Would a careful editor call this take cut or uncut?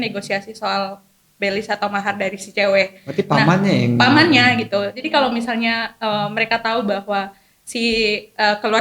cut